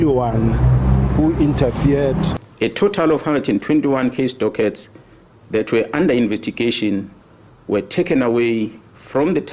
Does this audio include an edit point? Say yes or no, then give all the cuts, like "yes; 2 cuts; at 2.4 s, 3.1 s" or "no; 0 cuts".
yes; 1 cut; at 2.4 s